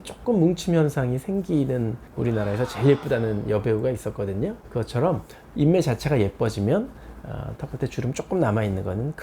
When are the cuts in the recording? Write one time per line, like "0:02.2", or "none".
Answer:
0:05.4

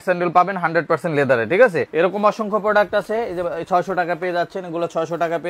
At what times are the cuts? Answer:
0:01.9

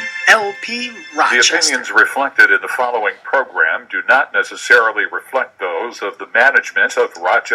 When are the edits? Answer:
0:01.3

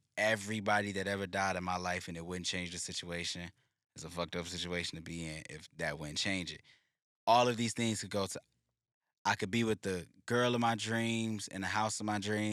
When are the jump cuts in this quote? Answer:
none

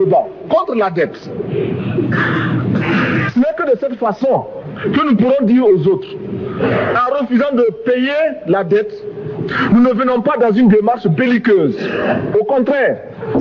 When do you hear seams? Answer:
none

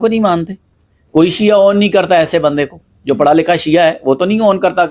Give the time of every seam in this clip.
none

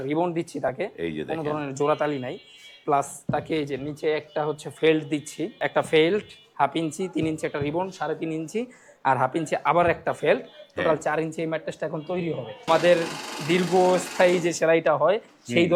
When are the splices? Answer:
0:05.7
0:12.7

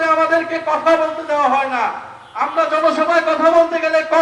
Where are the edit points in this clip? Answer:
none

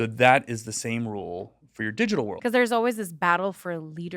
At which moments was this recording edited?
0:02.4

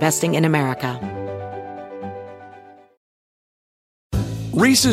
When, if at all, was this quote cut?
0:01.0

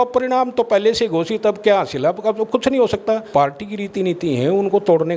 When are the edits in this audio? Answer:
0:03.3

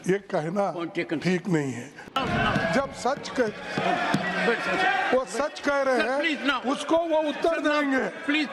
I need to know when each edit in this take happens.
0:02.0

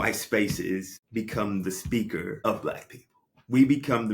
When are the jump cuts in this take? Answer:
0:01.0
0:02.4

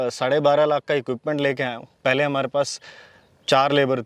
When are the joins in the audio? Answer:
0:01.9

